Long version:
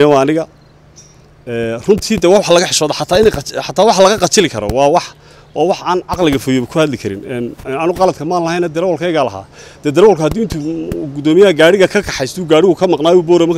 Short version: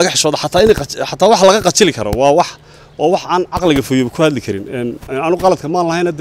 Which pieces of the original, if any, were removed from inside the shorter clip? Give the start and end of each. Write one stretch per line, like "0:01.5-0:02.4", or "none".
none

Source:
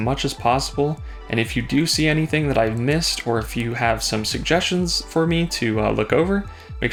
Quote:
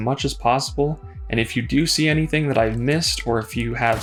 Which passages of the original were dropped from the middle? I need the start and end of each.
none

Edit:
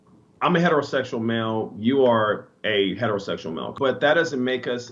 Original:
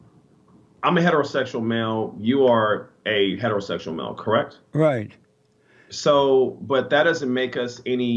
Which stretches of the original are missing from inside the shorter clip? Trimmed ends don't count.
0:04.1-0:06.6

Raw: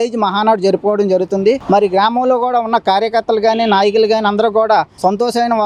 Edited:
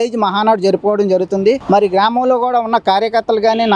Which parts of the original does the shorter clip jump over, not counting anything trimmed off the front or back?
none

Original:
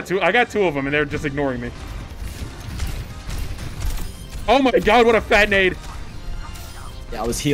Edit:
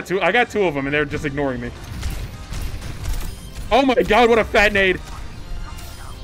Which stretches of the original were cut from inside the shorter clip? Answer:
0:01.8-0:02.5

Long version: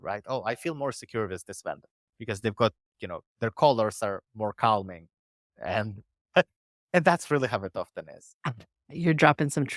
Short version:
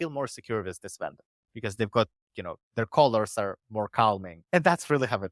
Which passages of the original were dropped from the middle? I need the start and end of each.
0:05.0-0:06.7

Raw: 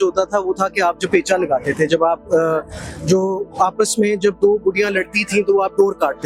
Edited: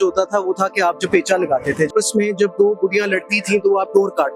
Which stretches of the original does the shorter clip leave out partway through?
0:01.9-0:03.7

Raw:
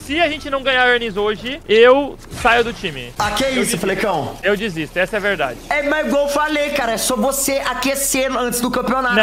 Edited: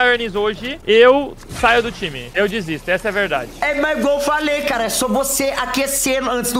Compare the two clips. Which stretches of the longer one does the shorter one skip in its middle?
0:03.1-0:04.3

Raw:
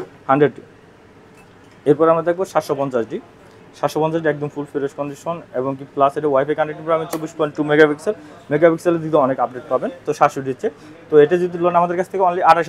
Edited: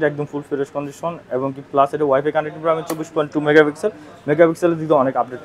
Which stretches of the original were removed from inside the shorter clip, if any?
none

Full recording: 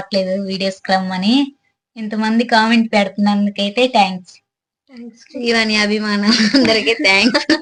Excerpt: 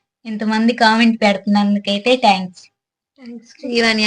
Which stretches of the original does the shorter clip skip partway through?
none

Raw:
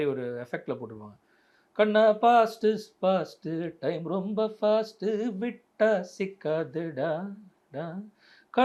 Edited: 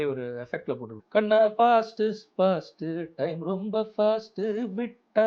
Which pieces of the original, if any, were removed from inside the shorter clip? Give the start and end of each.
0:00.9-0:01.6

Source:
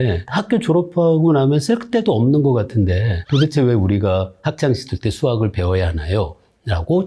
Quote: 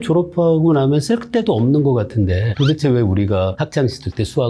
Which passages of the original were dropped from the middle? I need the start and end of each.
0:03.1-0:03.2
0:04.3-0:04.5

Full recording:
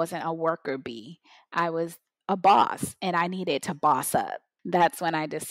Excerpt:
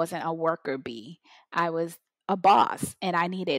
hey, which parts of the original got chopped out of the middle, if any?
none

